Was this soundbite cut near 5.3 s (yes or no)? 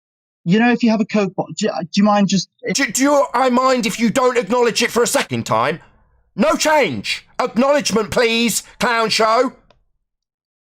yes